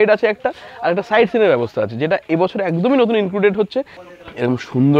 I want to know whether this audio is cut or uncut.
cut